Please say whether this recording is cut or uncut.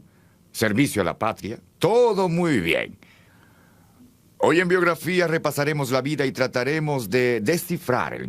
cut